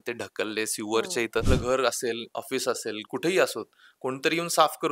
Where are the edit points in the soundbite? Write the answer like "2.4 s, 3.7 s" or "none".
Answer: 1.5 s